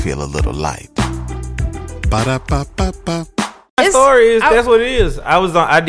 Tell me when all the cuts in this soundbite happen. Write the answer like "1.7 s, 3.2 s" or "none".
3.8 s

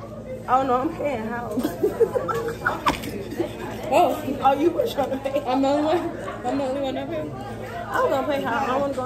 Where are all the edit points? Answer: none

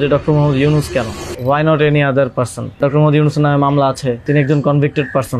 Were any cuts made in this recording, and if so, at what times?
1.2 s, 2.8 s, 4.2 s

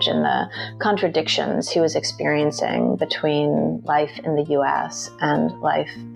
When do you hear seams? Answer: none

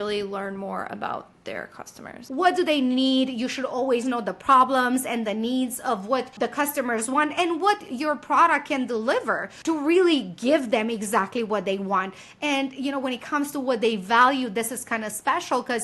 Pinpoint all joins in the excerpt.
2.2 s

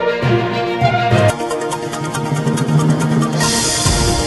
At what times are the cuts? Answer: 1.0 s

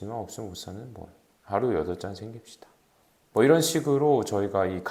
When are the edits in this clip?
none

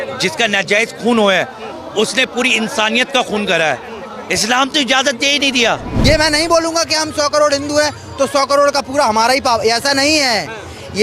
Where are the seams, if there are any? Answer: 5.9 s

